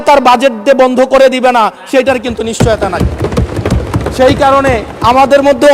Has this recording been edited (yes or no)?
no